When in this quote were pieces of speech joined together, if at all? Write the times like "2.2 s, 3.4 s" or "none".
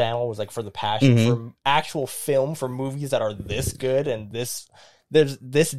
none